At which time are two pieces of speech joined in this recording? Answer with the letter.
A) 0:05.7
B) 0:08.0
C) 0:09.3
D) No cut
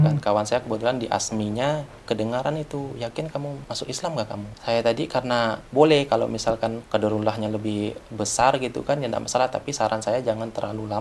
A